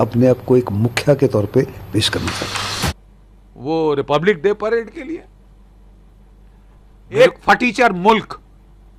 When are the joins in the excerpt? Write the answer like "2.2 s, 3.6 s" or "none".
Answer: none